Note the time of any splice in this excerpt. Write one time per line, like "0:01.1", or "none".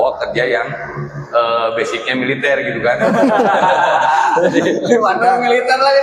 none